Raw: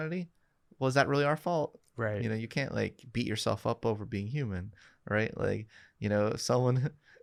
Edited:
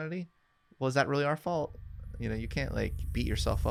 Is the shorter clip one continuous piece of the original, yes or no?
yes